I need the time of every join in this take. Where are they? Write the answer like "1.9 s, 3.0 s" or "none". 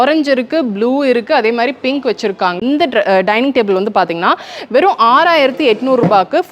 2.5 s